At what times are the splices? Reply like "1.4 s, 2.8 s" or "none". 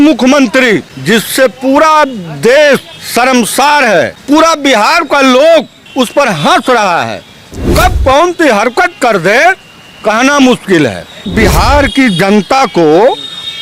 0.9 s, 3.0 s, 4.2 s, 5.8 s, 11.3 s